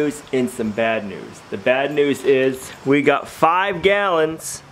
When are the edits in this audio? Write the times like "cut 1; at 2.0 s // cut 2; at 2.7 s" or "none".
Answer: cut 1; at 2.7 s